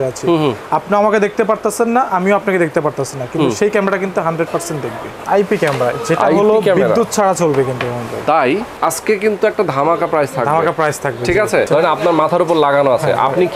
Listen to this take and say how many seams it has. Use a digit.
3